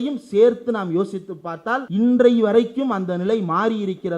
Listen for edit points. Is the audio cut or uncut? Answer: cut